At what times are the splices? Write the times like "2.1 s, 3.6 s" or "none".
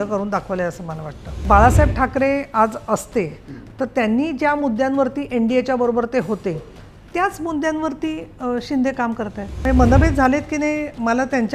1.4 s, 9.6 s